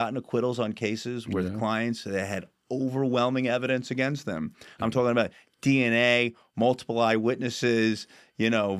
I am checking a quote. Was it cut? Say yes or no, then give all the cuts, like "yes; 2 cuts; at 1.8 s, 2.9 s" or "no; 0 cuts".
no; 0 cuts